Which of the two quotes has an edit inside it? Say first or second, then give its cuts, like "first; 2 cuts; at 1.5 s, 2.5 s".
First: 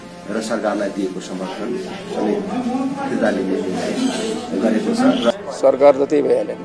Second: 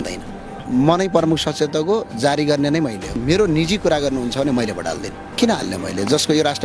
first; 1 cut; at 5.3 s